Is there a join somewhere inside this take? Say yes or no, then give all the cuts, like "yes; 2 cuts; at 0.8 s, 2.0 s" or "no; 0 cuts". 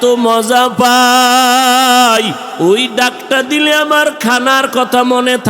yes; 1 cut; at 2.4 s